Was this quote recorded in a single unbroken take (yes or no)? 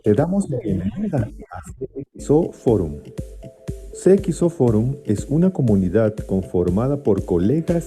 yes